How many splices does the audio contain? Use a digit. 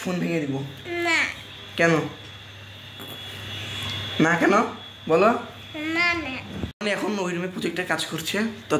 1